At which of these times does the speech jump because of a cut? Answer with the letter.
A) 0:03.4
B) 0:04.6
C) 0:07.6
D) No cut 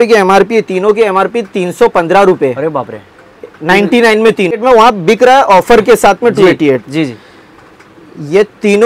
B